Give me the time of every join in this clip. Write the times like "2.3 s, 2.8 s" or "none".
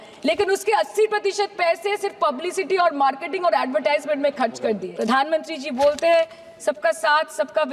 4.9 s